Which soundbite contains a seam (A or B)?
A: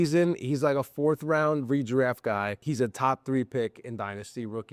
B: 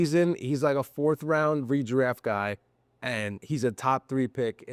A